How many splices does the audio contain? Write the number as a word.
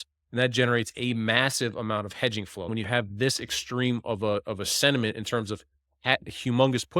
one